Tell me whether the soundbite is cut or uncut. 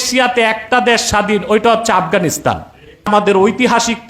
cut